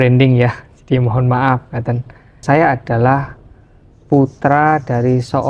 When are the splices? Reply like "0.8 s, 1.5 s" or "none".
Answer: 2.4 s